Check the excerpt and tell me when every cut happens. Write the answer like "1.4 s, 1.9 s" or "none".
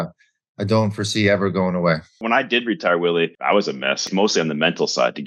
2.1 s, 3.9 s